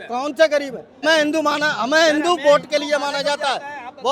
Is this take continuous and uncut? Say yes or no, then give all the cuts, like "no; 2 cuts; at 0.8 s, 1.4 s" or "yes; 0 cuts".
no; 1 cut; at 1.0 s